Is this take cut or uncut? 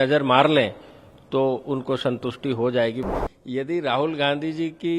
cut